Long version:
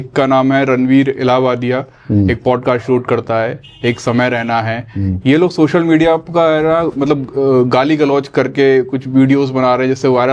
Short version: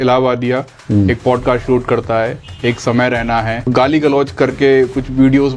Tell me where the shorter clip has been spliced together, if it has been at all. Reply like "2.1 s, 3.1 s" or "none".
3.7 s